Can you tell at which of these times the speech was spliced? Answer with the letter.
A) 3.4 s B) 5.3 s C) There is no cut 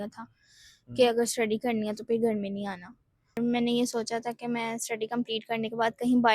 A